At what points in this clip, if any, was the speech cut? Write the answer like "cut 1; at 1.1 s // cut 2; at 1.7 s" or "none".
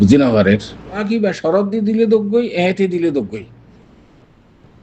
cut 1; at 1.0 s